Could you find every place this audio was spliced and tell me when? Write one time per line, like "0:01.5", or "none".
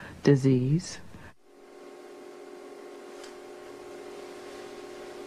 0:02.9

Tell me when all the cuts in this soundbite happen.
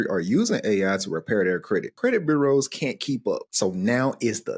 0:01.9
0:03.5

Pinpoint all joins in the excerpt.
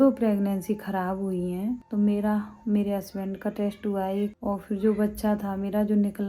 0:01.8
0:04.4

